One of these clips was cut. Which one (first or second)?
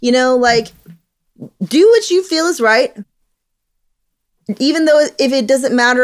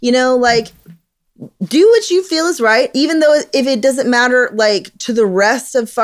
second